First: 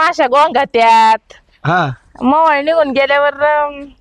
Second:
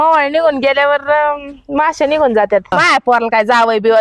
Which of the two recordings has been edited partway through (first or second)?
second